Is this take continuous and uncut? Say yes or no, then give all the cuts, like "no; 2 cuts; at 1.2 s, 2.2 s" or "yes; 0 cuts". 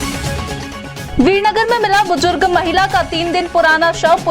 no; 1 cut; at 1.0 s